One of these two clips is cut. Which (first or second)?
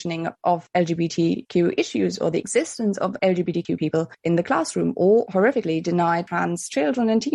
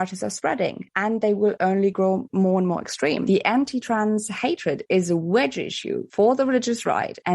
second